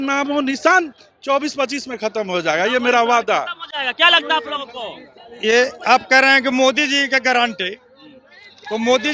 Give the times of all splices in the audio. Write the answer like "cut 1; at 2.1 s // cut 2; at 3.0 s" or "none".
none